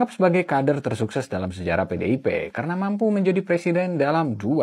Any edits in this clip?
no; 0 cuts

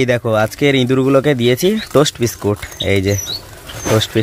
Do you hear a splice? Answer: no; 0 cuts

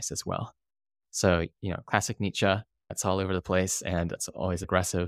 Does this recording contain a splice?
yes; 1 cut; at 3.0 s

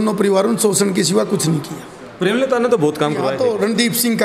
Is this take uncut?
no; 1 cut; at 3.3 s

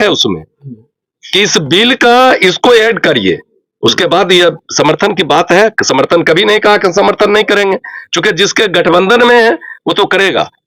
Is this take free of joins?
yes; 0 cuts

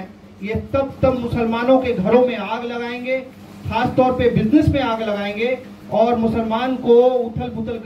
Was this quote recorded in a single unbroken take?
yes; 0 cuts

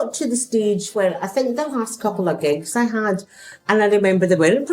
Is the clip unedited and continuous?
yes; 0 cuts

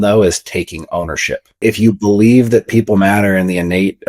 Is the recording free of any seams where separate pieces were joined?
no; 1 cut; at 1.6 s

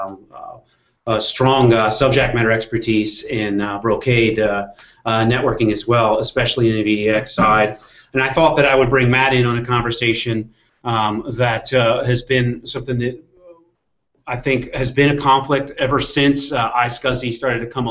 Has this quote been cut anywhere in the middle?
yes; 1 cut; at 3.8 s

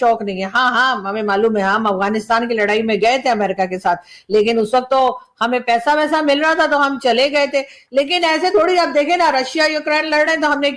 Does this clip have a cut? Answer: no; 0 cuts

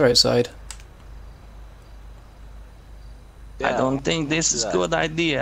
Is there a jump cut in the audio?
no; 0 cuts

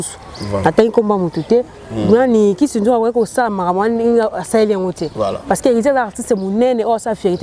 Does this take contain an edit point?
no; 0 cuts

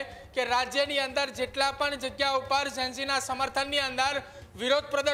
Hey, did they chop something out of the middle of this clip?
no; 0 cuts

